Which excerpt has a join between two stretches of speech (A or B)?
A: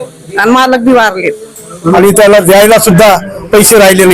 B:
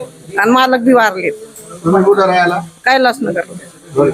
A